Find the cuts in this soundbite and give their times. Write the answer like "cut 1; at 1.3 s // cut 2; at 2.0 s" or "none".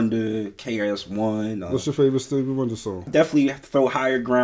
cut 1; at 3.0 s